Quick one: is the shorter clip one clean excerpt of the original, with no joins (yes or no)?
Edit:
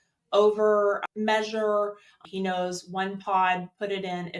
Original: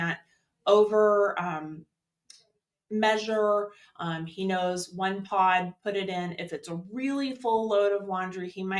no